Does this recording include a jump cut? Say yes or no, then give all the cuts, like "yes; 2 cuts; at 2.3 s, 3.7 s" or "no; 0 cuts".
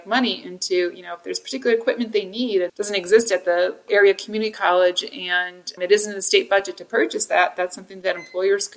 yes; 2 cuts; at 2.7 s, 3.8 s